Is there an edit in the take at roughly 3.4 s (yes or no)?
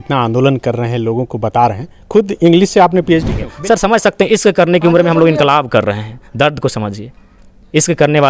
yes